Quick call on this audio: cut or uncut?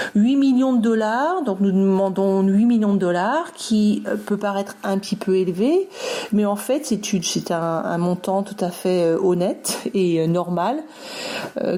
uncut